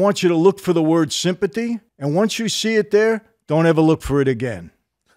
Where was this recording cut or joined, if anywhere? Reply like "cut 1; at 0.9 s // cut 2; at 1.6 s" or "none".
cut 1; at 1.9 s